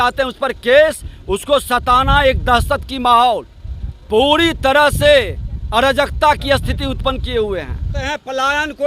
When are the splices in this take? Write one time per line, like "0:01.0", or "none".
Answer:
0:08.0